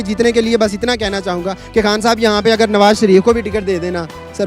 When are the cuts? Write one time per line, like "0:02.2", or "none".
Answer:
none

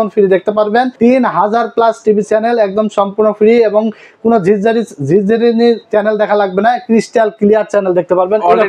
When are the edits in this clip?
0:00.9

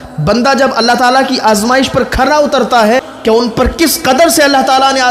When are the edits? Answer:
0:03.1

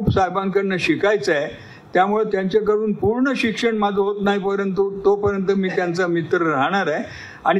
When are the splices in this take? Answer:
none

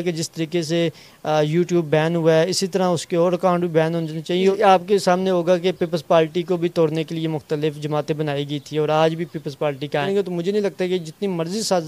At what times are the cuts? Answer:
0:04.4
0:10.0

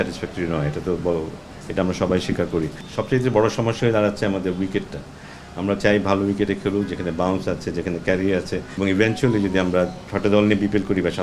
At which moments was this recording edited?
0:02.9
0:08.7

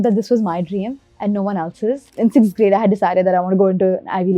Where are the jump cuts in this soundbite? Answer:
0:02.1

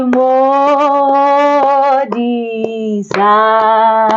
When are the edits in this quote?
none

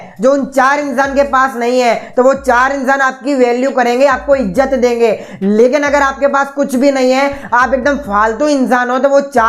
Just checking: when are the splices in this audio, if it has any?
none

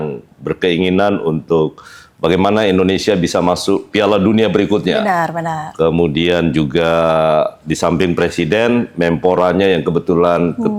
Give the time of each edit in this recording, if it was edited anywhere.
none

